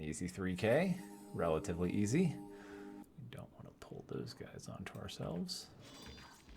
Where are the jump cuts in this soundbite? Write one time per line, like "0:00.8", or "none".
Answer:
0:03.0